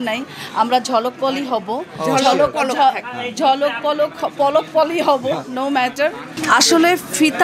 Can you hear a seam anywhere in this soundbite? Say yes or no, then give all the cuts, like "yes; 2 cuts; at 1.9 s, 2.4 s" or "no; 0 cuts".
yes; 1 cut; at 6.3 s